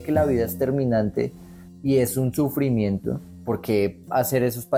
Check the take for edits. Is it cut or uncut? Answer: uncut